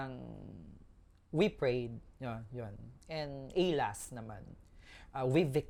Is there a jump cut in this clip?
no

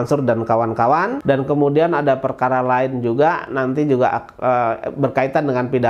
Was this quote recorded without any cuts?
no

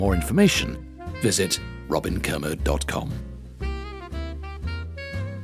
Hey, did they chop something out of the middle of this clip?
yes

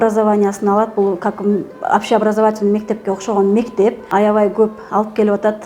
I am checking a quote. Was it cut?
yes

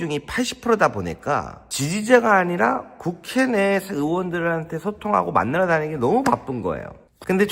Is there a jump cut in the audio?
yes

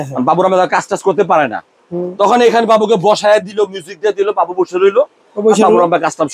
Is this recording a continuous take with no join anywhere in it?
yes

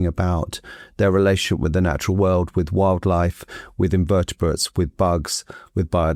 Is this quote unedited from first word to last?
yes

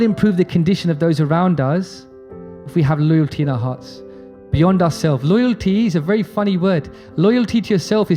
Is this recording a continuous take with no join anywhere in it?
yes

